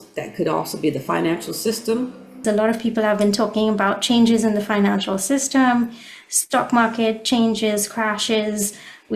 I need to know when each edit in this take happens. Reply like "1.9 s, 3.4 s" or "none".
2.4 s